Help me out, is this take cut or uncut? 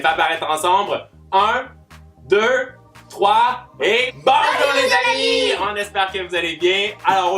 cut